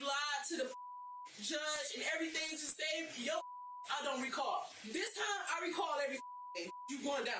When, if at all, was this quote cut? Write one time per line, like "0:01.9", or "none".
0:04.7